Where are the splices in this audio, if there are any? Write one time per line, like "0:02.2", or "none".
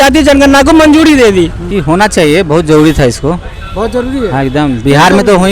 0:01.7

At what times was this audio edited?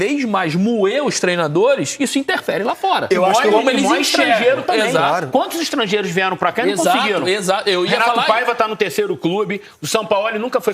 none

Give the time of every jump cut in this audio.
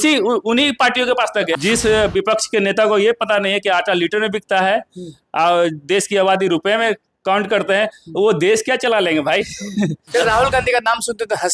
0:01.6
0:10.1

